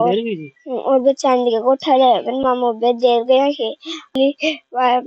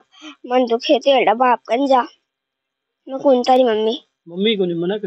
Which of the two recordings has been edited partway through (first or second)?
first